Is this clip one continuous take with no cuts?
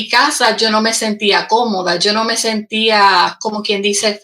yes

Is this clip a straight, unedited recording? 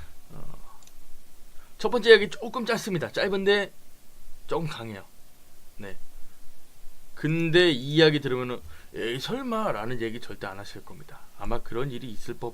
no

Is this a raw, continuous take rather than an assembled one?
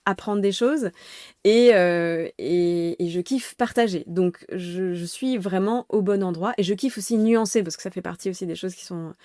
yes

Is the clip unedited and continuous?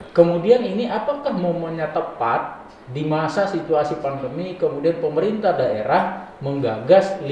yes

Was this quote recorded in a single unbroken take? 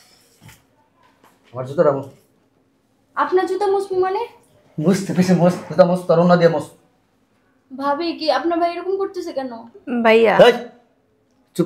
yes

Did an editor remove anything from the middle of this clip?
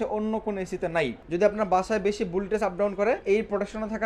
yes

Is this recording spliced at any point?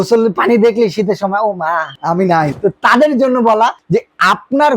yes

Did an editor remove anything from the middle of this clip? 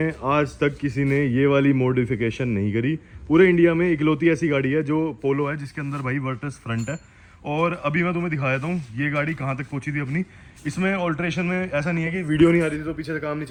no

